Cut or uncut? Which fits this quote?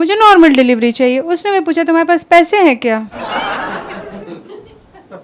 uncut